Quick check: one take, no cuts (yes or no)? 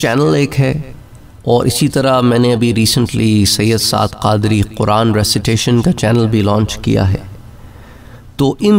yes